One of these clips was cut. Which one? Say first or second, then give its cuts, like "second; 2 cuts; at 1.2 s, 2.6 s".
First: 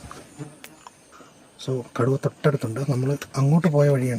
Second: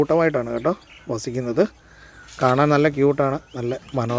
first; 1 cut; at 1.2 s